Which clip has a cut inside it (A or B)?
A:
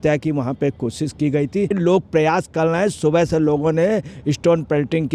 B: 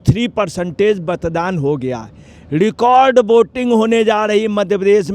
A